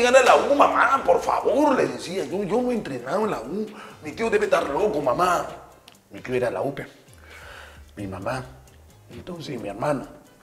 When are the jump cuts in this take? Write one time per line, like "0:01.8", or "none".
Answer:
none